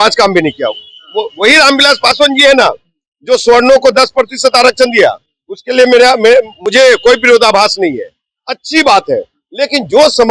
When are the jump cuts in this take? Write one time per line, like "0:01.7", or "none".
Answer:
none